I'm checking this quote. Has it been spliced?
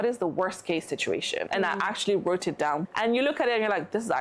yes; 2 cuts; at 1.5 s, 2.8 s

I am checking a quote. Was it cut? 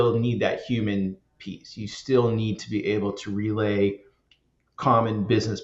no; 0 cuts

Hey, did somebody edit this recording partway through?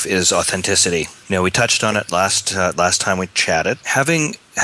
yes; 2 cuts; at 1.2 s, 3.8 s

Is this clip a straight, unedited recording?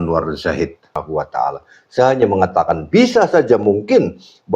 no; 1 cut; at 1.0 s

